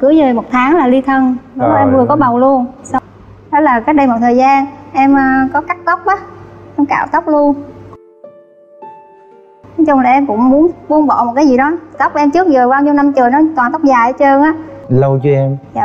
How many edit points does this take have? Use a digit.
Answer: 1